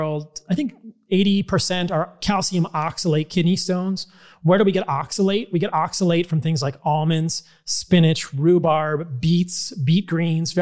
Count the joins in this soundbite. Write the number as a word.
zero